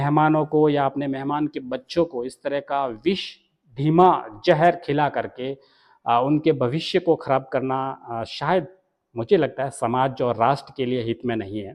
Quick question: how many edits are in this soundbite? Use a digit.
0